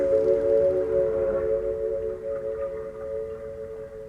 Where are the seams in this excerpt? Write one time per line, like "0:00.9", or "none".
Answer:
none